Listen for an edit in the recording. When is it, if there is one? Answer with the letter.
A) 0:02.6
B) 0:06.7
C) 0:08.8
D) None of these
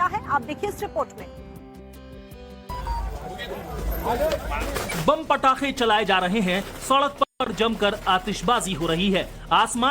B